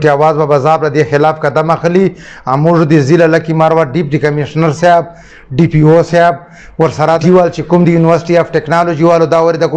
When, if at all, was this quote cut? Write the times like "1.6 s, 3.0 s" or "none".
7.2 s